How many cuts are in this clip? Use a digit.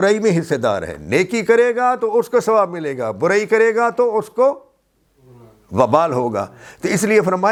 0